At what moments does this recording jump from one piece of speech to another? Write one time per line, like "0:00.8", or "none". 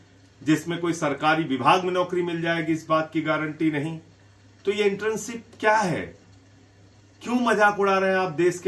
none